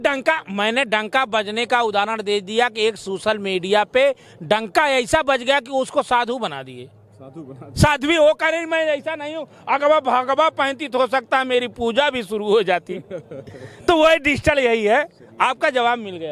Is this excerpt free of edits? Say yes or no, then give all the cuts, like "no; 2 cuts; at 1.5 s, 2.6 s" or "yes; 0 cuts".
yes; 0 cuts